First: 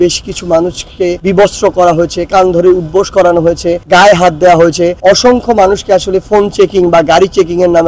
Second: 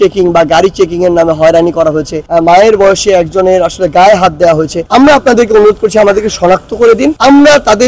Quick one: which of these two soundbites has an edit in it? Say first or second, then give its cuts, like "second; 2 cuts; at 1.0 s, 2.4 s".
second; 2 cuts; at 2.2 s, 4.8 s